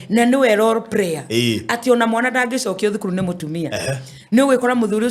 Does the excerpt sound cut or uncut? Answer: uncut